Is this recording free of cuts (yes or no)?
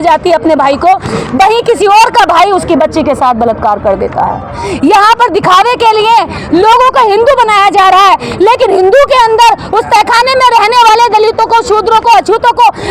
yes